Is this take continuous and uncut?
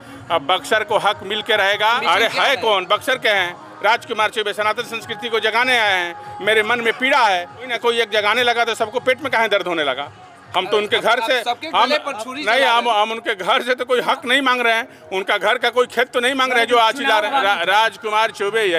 no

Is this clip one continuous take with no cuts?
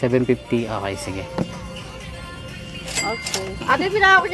yes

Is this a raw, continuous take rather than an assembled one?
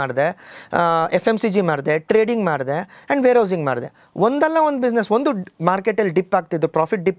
yes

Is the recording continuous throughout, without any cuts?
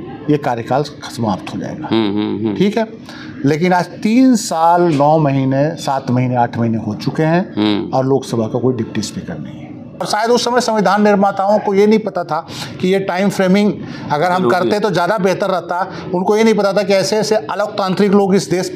no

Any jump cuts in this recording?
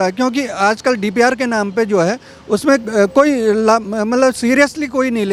no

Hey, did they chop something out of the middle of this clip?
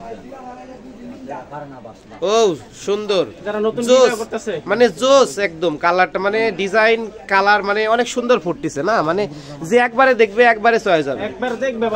no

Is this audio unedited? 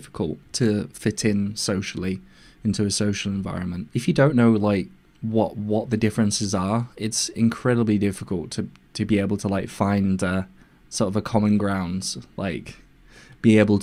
yes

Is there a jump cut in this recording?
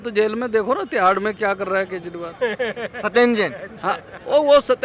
no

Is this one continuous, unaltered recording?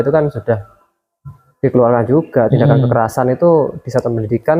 yes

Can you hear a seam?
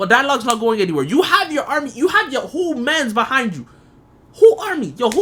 no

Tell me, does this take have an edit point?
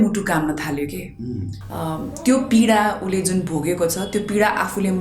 yes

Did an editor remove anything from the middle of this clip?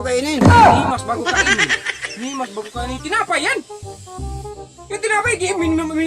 no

